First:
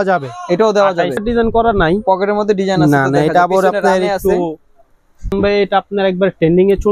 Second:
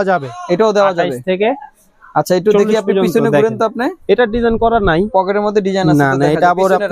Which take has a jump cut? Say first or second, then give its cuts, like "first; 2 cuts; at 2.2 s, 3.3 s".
first; 2 cuts; at 1.2 s, 5.3 s